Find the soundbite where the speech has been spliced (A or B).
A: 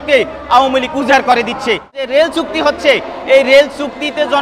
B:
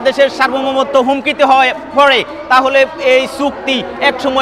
A